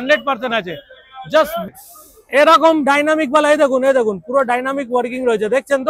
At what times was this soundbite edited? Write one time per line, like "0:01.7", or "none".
0:01.6